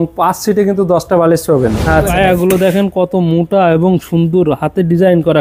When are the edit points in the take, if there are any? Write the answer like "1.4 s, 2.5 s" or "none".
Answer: 2.1 s

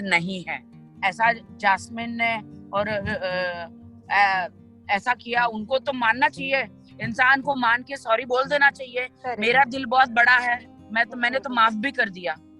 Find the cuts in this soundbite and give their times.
1.0 s

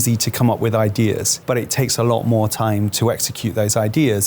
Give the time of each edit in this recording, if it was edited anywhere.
1.3 s

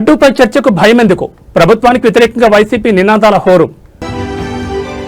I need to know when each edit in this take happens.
none

